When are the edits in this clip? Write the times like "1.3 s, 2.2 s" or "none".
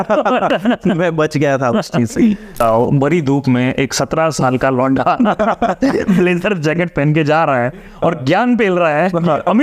2.6 s